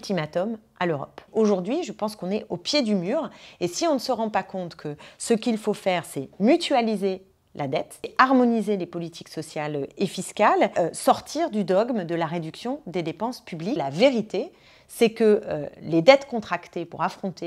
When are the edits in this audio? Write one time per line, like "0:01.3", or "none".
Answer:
0:01.2
0:08.1
0:10.7
0:13.8